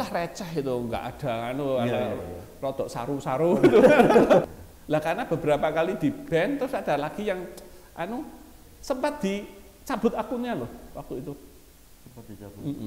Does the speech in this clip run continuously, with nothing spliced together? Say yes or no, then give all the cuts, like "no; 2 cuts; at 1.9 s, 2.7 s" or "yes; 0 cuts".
no; 1 cut; at 4.4 s